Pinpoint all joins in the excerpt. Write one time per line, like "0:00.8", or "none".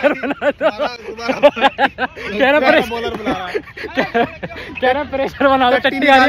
none